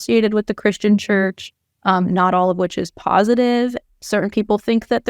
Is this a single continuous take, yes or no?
no